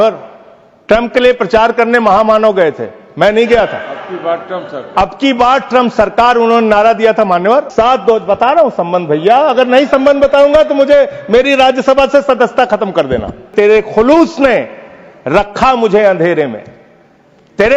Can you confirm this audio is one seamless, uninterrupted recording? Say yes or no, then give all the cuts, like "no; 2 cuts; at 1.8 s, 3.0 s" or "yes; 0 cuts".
no; 2 cuts; at 7.7 s, 13.5 s